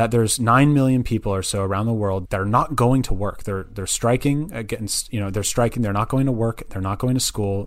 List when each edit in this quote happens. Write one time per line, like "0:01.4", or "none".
0:02.2